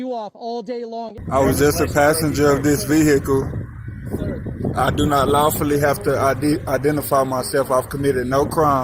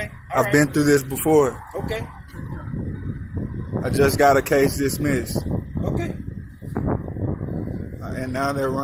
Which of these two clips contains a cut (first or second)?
first